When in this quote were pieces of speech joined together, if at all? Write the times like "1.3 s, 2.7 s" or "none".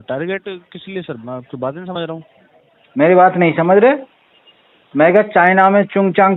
none